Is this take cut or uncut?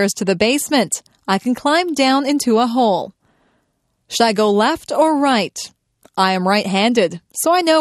uncut